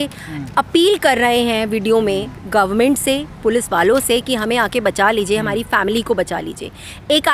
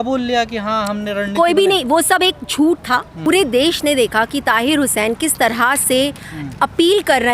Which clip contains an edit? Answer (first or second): second